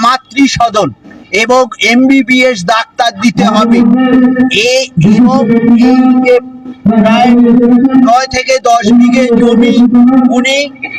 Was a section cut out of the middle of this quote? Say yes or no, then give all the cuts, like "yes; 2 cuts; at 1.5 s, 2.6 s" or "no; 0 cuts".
no; 0 cuts